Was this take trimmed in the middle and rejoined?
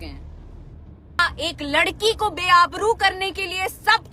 yes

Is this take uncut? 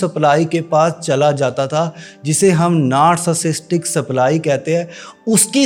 yes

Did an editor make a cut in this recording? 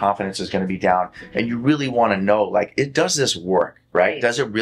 no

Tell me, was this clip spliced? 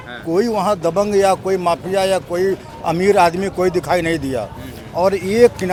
no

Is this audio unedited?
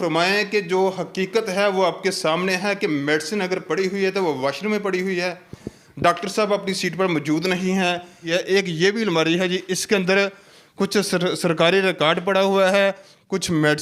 no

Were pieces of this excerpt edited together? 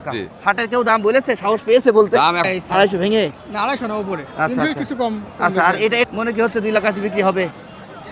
yes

